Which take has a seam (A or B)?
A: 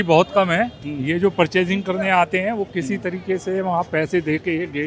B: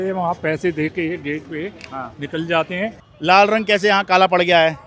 B